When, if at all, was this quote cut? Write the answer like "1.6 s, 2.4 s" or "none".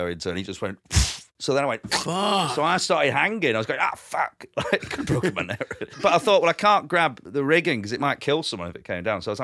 5.9 s, 7.2 s, 8.2 s